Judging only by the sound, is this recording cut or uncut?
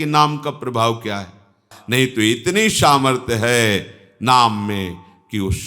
cut